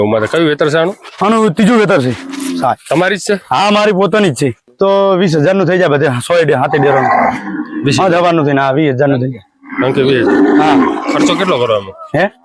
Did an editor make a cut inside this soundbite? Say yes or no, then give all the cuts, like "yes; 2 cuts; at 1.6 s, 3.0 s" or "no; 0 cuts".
yes; 1 cut; at 4.6 s